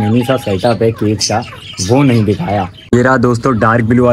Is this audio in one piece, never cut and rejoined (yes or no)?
no